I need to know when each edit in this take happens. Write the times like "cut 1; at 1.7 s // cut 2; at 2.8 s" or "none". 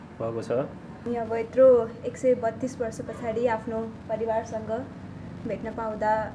cut 1; at 1.0 s